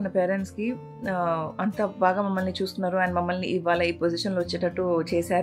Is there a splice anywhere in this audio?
no; 0 cuts

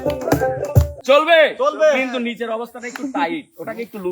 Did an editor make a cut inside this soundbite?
yes; 1 cut; at 0.9 s

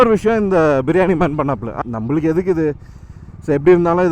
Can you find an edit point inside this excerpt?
yes; 1 cut; at 1.7 s

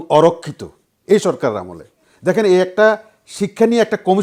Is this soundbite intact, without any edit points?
yes; 0 cuts

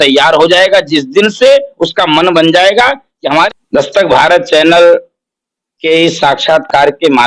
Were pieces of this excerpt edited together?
yes; 1 cut; at 3.5 s

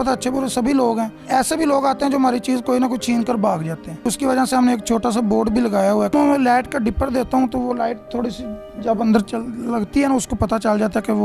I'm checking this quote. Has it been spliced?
yes; 1 cut; at 6.1 s

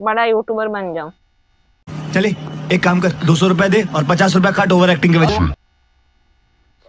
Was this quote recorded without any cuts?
yes; 0 cuts

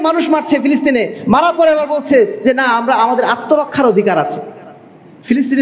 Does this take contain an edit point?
no; 0 cuts

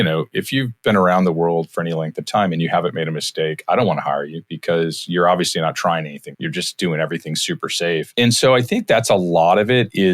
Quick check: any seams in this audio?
yes; 2 cuts; at 6.2 s, 8.1 s

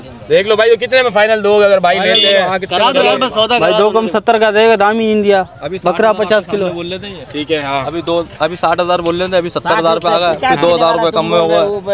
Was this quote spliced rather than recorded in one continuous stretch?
no; 0 cuts

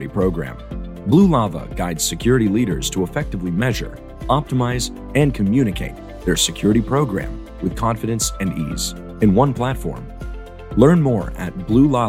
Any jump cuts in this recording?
no; 0 cuts

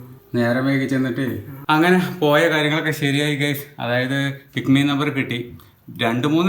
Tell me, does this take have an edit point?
yes; 1 cut; at 1.5 s

